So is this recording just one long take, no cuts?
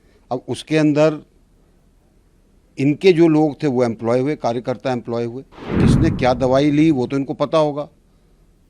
no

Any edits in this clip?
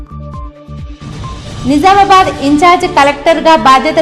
yes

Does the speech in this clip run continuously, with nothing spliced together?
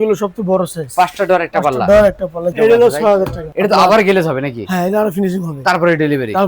no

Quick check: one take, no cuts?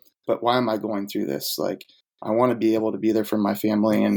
yes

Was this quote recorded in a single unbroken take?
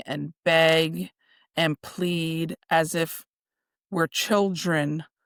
yes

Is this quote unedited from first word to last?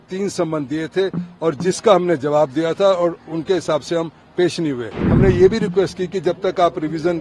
no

